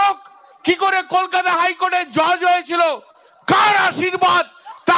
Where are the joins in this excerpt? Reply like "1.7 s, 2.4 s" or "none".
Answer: none